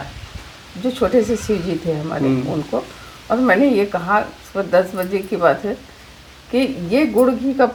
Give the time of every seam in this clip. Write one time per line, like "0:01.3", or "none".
none